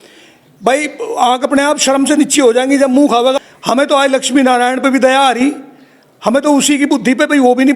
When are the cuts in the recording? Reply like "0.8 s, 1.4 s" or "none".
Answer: 3.5 s